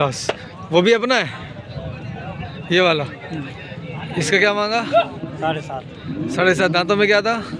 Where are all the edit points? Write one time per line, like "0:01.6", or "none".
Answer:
none